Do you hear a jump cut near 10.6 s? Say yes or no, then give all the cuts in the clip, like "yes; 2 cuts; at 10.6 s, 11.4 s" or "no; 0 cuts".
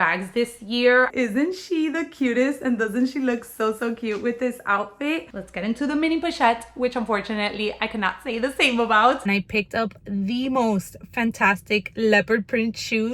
no; 3 cuts; at 1.1 s, 5.4 s, 9.2 s